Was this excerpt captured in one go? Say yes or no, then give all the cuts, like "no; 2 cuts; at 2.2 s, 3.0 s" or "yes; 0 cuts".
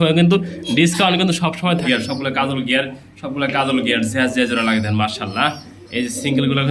no; 1 cut; at 1.8 s